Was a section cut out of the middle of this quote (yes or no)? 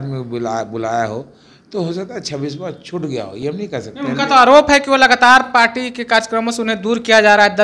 no